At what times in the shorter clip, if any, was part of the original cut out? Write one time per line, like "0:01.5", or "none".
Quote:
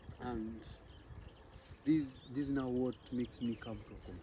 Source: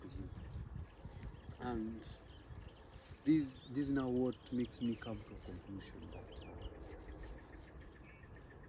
none